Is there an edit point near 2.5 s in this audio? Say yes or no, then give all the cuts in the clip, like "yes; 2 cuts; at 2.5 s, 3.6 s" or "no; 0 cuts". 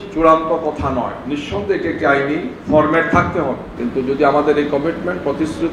yes; 2 cuts; at 2.5 s, 3.7 s